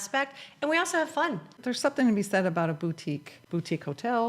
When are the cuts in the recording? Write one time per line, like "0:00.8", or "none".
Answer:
0:01.5
0:03.3